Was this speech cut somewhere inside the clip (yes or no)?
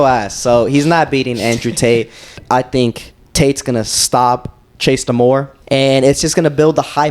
yes